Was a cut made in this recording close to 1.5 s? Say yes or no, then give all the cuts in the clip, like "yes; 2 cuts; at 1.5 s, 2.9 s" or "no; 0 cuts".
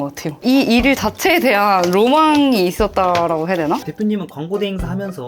no; 1 cut; at 3.8 s